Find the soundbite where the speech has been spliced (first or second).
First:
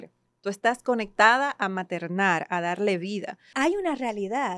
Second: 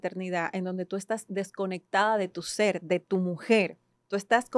first